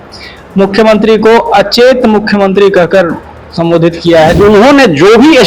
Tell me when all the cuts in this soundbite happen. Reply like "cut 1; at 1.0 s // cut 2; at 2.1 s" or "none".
cut 1; at 4.4 s